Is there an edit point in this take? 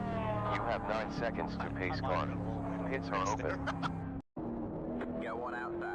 yes; 1 cut; at 4.3 s

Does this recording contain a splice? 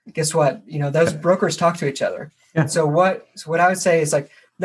no; 0 cuts

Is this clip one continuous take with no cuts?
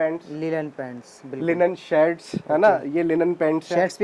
yes; 0 cuts

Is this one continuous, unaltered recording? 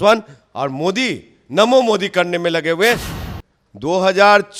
no; 1 cut; at 3.1 s

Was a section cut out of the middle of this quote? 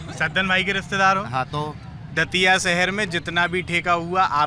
no; 0 cuts

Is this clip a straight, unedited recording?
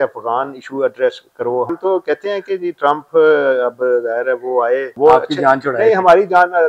no; 2 cuts; at 1.7 s, 4.9 s

